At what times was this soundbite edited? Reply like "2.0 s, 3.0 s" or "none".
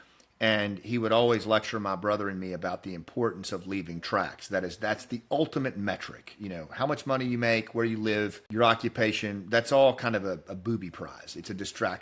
8.4 s

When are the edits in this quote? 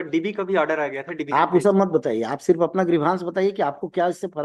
none

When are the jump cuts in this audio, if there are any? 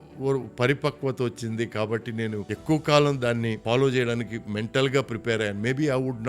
2.5 s, 3.6 s

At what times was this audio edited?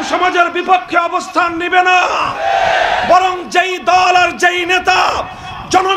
none

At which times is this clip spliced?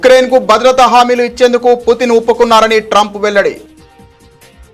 3.8 s

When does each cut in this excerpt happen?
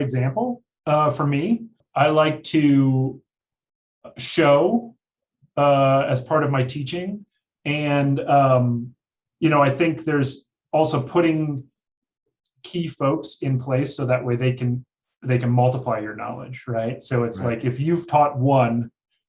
1.8 s

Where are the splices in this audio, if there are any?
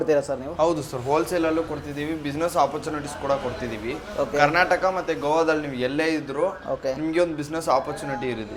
none

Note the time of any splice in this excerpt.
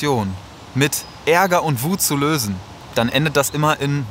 2.7 s

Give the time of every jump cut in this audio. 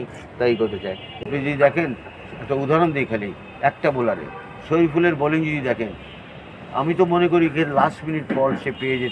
1.1 s

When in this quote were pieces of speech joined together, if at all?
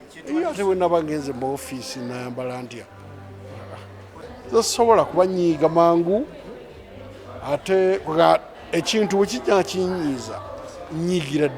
4.2 s

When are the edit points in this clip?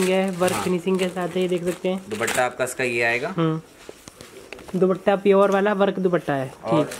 none

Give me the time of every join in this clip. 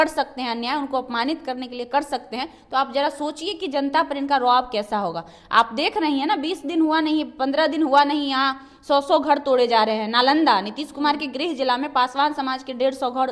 none

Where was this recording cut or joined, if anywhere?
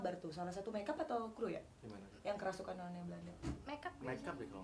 none

